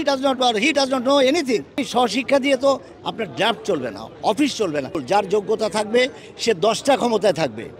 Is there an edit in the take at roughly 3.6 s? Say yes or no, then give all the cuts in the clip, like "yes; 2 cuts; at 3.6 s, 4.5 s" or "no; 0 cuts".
no; 2 cuts; at 1.8 s, 5.0 s